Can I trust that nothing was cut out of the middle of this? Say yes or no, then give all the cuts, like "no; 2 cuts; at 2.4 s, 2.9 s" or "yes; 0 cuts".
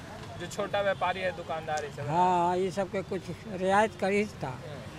yes; 0 cuts